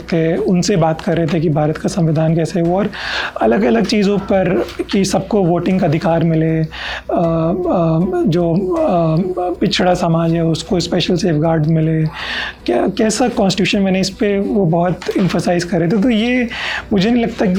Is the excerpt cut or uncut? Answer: uncut